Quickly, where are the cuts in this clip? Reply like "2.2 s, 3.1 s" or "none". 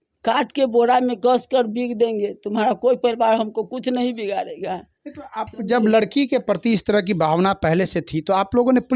none